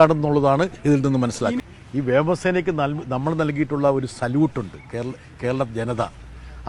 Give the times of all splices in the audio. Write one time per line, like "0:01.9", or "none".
0:01.7